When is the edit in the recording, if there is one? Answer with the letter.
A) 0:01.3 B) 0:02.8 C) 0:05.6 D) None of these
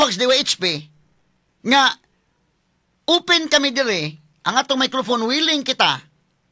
D